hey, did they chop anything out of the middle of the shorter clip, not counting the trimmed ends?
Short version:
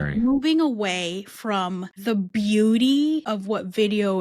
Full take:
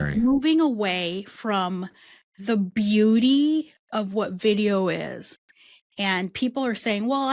yes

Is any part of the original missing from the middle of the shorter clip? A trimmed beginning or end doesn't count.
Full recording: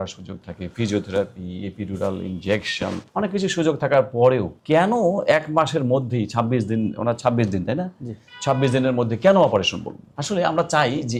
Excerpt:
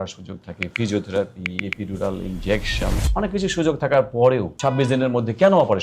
yes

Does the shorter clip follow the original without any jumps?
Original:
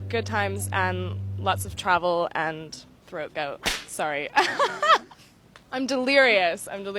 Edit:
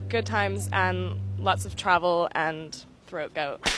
yes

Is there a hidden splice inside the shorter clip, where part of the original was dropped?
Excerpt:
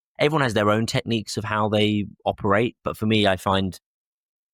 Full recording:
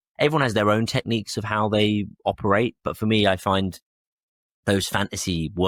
no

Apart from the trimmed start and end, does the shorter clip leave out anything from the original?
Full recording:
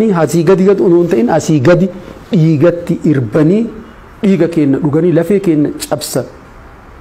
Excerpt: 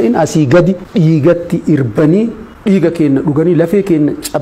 yes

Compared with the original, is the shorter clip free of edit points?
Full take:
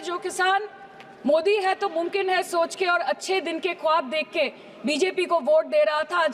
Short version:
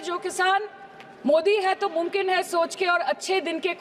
yes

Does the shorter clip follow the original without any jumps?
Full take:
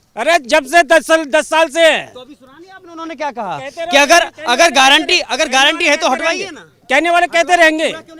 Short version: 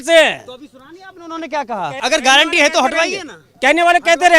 no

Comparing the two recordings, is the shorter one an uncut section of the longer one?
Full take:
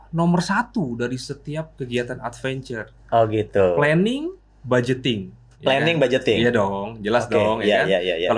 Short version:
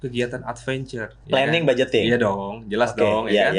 no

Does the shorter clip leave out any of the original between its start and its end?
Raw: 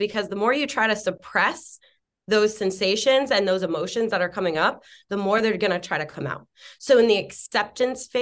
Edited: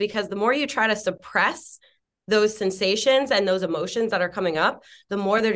no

